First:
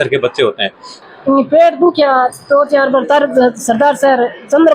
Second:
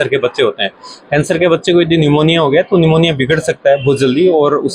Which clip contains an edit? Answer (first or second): first